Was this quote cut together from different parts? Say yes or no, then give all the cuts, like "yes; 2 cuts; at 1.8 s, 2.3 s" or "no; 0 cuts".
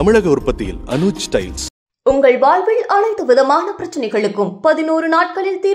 no; 0 cuts